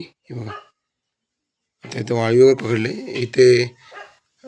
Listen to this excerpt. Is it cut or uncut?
uncut